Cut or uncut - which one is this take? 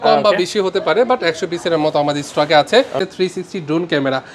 cut